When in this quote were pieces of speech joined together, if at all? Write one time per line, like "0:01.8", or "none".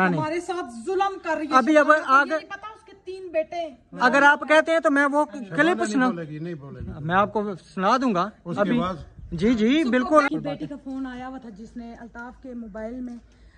0:10.3